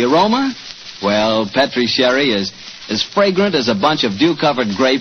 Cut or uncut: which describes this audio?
cut